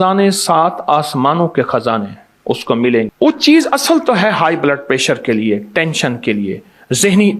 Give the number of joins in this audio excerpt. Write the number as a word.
one